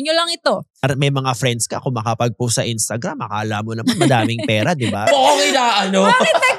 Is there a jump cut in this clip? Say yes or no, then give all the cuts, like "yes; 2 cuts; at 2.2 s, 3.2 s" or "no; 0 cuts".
yes; 2 cuts; at 0.8 s, 5.1 s